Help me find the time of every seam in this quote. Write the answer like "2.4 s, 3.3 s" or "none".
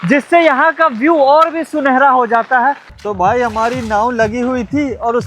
2.9 s